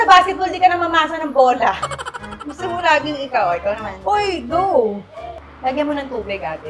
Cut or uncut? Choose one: uncut